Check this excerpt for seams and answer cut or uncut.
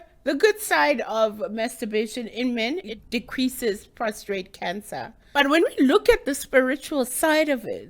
cut